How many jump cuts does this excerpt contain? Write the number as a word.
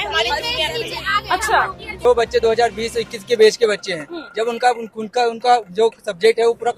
one